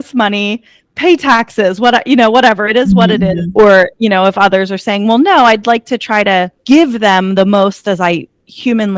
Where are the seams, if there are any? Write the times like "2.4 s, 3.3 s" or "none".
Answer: 3.5 s, 6.6 s